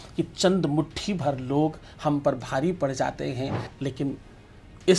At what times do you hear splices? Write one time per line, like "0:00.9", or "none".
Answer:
0:03.6